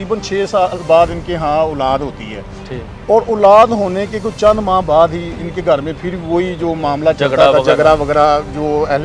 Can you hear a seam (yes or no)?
no